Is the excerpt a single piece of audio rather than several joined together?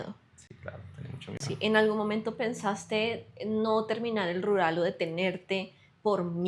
yes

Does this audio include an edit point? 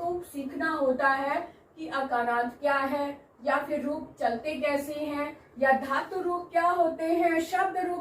no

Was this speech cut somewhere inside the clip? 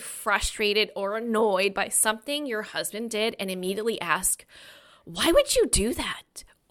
no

